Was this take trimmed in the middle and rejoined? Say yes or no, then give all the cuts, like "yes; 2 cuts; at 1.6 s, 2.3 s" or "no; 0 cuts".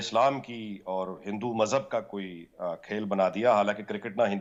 no; 0 cuts